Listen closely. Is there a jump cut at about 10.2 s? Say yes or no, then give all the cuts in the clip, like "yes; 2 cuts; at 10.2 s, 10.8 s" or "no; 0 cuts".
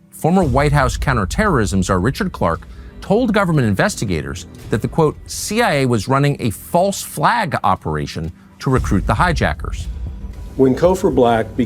no; 0 cuts